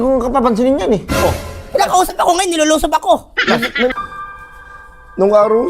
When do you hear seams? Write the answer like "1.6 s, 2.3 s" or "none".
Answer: 3.9 s